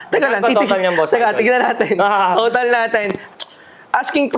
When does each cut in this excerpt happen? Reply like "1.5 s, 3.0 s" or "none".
3.2 s